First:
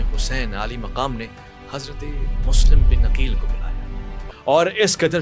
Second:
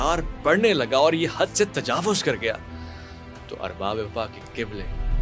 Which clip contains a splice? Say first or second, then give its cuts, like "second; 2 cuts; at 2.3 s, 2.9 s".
first; 1 cut; at 4.3 s